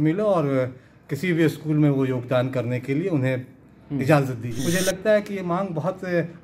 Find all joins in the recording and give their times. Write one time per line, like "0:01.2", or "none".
0:04.5

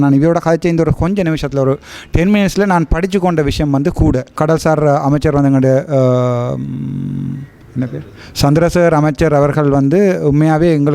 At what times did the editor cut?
0:04.4

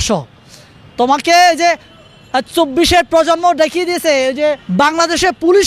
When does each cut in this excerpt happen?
0:04.6

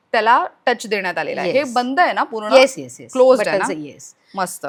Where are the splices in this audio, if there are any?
none

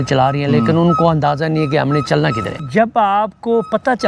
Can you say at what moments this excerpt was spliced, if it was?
0:02.6

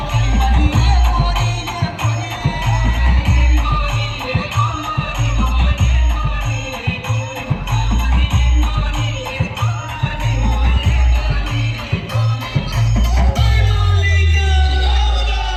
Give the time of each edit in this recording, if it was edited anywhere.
none

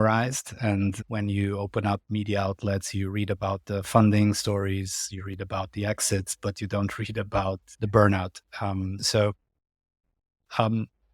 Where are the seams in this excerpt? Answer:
0:01.0
0:07.7
0:09.0

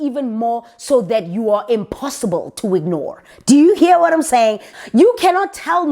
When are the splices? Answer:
0:04.7

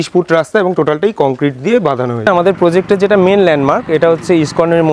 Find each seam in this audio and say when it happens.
0:02.3

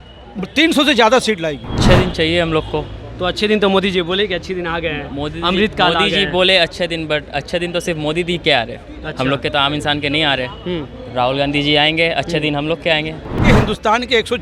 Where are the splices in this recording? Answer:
0:01.7
0:13.4

